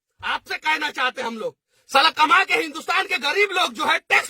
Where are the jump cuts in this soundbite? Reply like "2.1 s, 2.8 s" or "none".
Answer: 1.2 s